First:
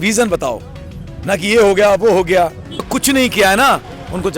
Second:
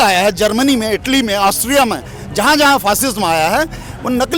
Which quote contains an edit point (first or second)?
first